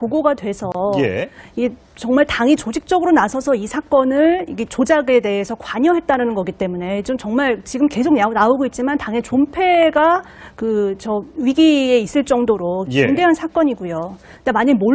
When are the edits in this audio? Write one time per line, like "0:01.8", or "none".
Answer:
none